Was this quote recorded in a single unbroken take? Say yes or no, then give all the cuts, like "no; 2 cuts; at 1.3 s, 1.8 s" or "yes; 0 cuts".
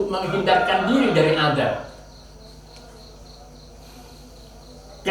yes; 0 cuts